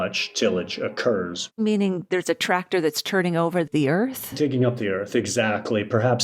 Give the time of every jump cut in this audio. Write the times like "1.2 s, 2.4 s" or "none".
1.6 s